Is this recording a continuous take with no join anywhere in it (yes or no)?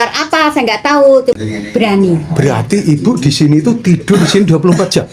no